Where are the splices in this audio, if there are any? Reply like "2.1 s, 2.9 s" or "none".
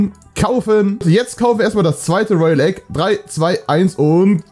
1.0 s